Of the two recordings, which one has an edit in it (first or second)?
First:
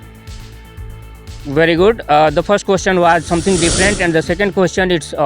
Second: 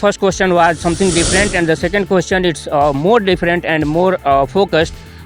first